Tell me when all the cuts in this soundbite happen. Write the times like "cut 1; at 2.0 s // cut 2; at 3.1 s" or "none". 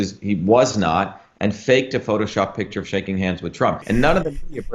cut 1; at 3.8 s